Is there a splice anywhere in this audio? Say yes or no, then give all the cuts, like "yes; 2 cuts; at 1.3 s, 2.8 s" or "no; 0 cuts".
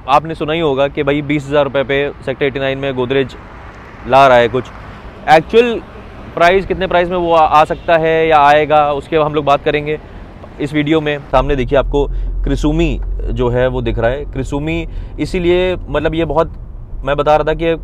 yes; 1 cut; at 11.3 s